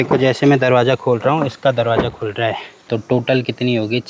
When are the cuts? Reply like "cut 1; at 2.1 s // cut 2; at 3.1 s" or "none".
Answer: cut 1; at 2.7 s